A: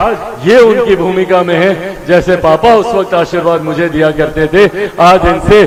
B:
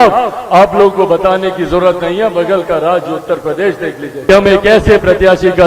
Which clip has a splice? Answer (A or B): B